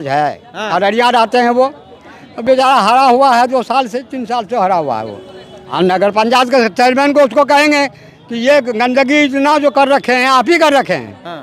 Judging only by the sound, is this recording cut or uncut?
cut